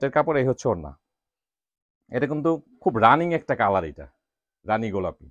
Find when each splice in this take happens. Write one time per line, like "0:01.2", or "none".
none

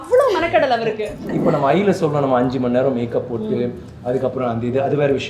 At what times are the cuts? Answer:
0:01.3

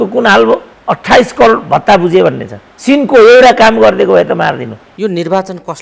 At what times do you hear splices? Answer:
0:04.8

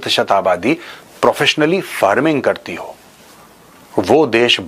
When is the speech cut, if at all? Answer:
none

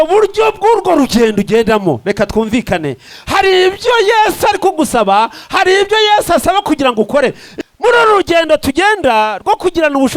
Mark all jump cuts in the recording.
0:07.5

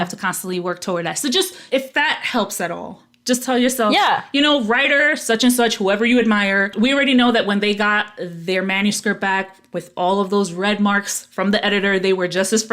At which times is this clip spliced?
0:06.7

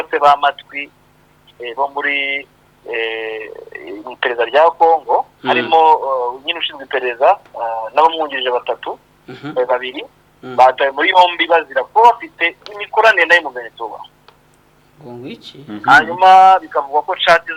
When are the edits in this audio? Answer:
none

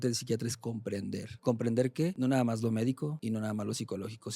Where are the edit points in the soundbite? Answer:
0:01.3
0:02.1
0:03.2

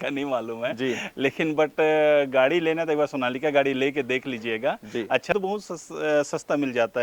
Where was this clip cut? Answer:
0:04.8

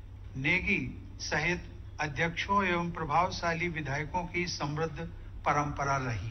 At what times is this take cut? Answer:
none

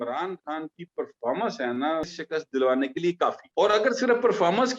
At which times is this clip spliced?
0:02.1
0:03.4

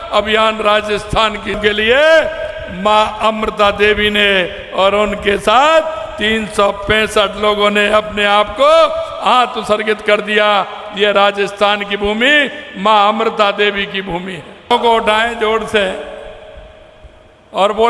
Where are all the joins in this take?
0:01.6
0:14.7

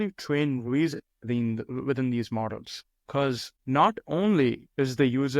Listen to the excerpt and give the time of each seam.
0:03.3

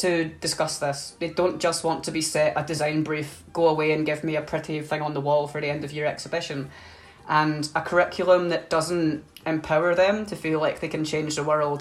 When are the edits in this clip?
none

